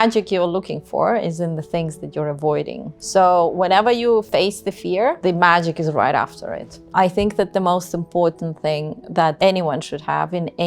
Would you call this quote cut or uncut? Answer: cut